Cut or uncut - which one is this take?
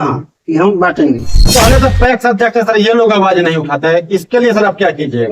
cut